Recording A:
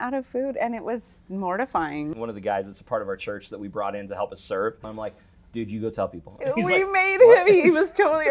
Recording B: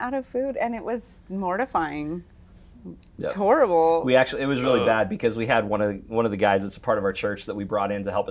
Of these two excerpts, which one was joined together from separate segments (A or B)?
A